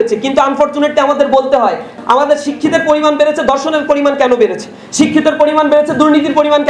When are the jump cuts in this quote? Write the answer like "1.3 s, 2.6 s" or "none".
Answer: 1.9 s